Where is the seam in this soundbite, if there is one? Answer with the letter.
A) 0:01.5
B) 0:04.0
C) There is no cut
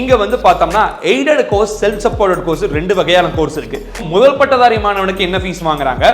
B